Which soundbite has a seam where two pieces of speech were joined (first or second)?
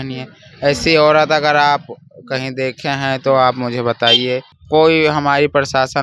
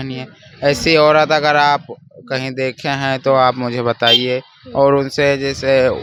first